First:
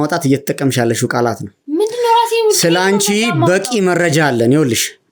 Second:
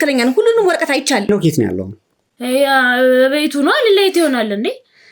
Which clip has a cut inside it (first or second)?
second